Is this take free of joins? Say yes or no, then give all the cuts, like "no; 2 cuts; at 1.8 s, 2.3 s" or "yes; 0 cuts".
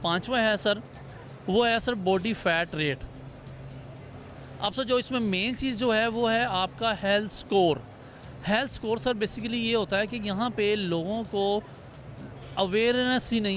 yes; 0 cuts